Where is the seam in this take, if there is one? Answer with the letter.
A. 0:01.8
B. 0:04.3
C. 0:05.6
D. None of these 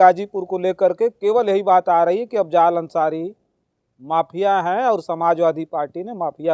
D